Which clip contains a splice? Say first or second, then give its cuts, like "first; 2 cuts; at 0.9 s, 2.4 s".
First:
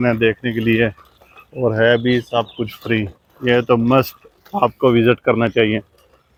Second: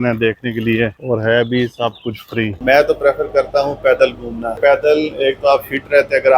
second; 3 cuts; at 1.0 s, 2.6 s, 4.6 s